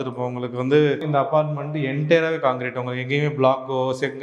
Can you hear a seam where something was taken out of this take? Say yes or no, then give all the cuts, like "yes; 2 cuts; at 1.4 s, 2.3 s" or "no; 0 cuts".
yes; 1 cut; at 1.0 s